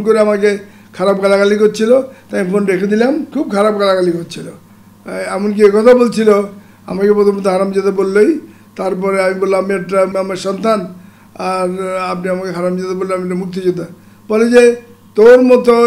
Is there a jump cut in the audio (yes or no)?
yes